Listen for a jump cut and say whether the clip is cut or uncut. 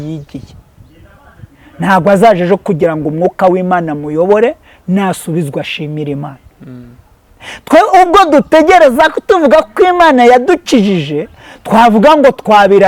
uncut